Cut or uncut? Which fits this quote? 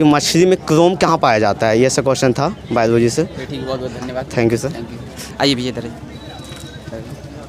uncut